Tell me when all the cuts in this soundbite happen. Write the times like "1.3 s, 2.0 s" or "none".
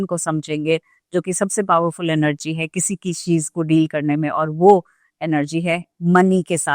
none